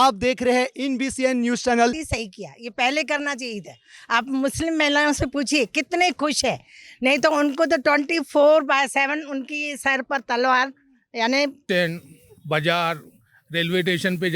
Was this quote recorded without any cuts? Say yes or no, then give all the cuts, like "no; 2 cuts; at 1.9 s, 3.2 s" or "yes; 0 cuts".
no; 2 cuts; at 2.1 s, 11.6 s